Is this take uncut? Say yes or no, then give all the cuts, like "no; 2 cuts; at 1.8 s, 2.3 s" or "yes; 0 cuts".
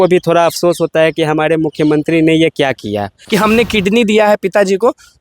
no; 1 cut; at 3.1 s